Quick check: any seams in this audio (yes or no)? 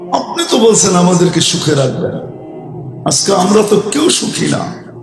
no